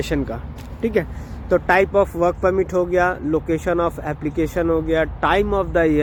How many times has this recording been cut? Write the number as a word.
zero